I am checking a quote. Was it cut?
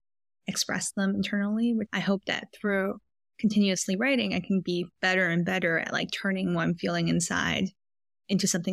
yes; 1 cut; at 1.9 s

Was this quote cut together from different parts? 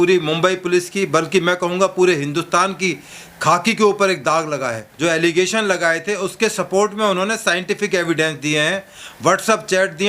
yes; 1 cut; at 4.8 s

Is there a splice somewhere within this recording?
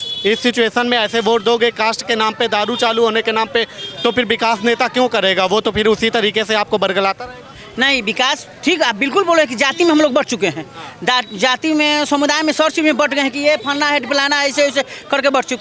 no; 0 cuts

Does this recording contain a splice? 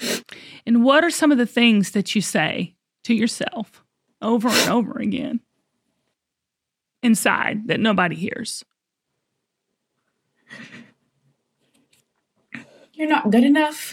no; 0 cuts

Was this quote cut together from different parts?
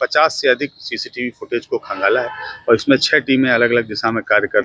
no; 0 cuts

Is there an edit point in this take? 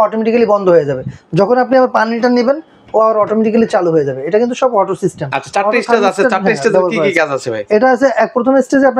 no; 0 cuts

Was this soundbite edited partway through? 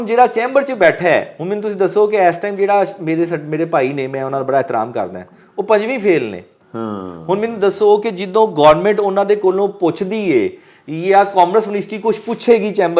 no; 0 cuts

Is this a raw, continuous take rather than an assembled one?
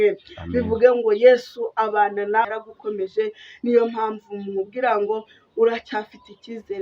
no; 1 cut; at 2.4 s

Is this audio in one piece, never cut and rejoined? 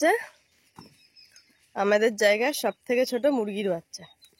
yes; 0 cuts

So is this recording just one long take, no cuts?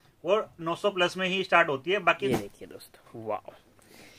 no; 1 cut; at 2.3 s

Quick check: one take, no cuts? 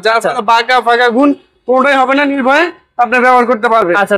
yes; 0 cuts

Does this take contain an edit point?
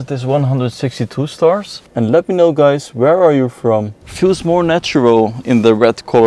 yes; 2 cuts; at 1.8 s, 4.0 s

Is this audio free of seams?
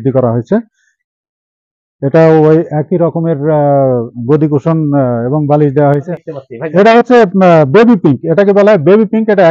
no; 1 cut; at 6.1 s

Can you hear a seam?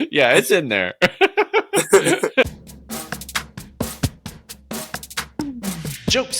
yes; 1 cut; at 2.4 s

